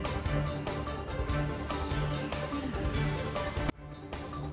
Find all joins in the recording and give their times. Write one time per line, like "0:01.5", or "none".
0:01.1